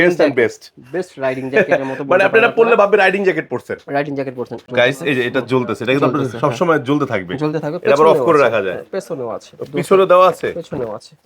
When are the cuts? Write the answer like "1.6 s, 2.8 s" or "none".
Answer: 4.7 s